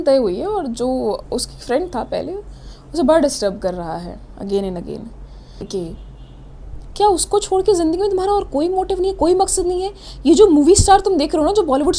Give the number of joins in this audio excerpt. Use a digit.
1